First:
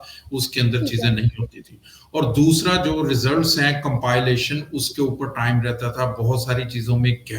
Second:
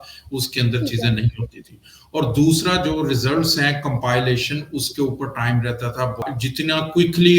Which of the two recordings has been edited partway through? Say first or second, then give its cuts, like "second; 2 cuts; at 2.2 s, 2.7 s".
second; 1 cut; at 6.2 s